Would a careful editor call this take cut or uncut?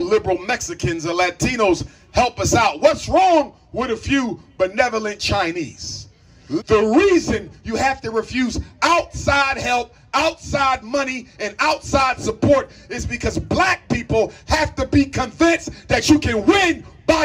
cut